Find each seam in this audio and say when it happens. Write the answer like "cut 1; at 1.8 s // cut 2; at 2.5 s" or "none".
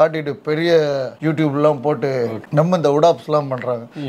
cut 1; at 1.1 s // cut 2; at 2.4 s